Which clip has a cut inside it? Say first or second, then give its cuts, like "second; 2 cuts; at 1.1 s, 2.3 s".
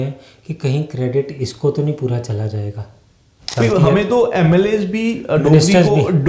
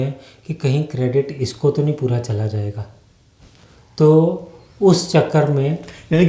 first; 1 cut; at 3.4 s